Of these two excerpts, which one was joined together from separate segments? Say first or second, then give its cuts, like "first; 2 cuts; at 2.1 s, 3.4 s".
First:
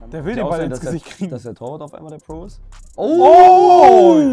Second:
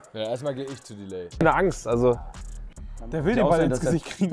second; 1 cut; at 1.4 s